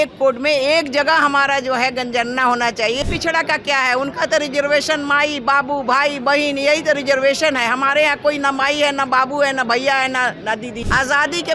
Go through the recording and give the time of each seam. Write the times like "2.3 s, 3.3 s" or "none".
3.0 s, 10.7 s